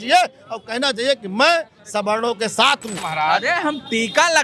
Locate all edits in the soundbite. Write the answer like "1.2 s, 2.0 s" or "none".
3.0 s